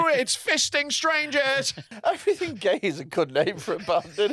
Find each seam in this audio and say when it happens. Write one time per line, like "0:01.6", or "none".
0:01.8